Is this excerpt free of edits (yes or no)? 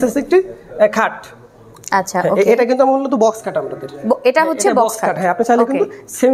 yes